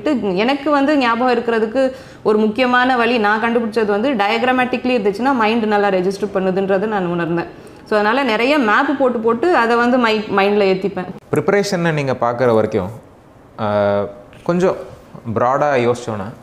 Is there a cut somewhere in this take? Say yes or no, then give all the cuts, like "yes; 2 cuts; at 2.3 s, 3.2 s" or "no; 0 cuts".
no; 0 cuts